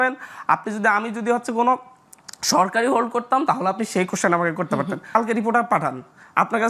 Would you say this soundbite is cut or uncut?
cut